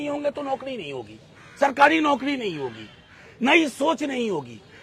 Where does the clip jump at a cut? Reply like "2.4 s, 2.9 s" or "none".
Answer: none